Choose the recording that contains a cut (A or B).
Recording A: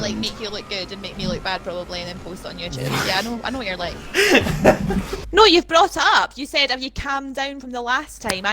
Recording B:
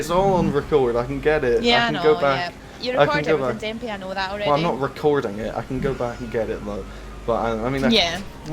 A